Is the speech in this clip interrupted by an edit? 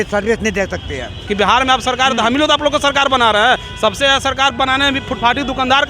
yes; 1 cut; at 1.2 s

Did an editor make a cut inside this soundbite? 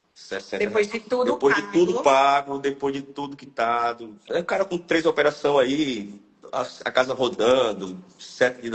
yes; 1 cut; at 4.2 s

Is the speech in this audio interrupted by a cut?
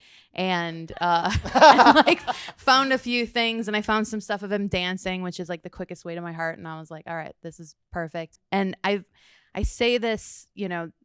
yes; 1 cut; at 8.4 s

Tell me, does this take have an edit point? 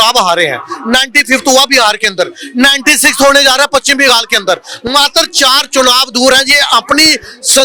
no; 0 cuts

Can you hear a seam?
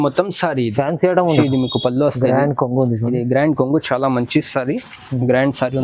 yes; 1 cut; at 1.4 s

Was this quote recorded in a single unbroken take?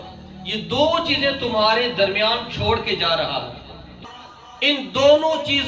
no; 1 cut; at 3.9 s

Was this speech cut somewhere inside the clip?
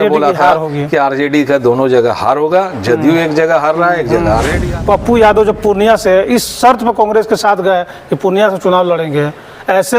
yes; 1 cut; at 4.6 s

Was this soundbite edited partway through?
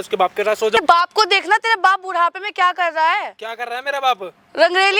no; 0 cuts

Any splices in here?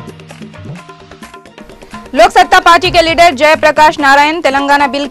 yes; 1 cut; at 1.2 s

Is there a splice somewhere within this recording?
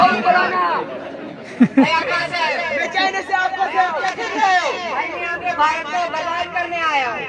yes; 1 cut; at 4.0 s

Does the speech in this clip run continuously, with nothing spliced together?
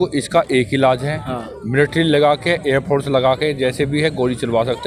yes; 0 cuts

